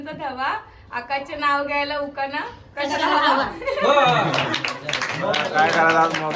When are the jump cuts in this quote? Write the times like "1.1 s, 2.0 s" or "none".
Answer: none